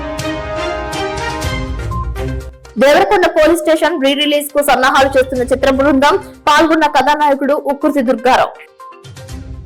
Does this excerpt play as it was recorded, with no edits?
yes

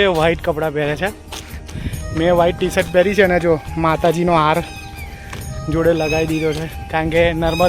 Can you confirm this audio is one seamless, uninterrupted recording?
no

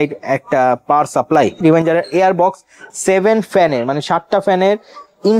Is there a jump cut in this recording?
yes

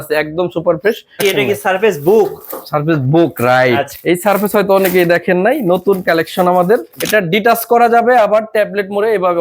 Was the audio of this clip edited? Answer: yes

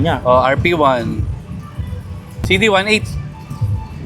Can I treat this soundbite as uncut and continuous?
no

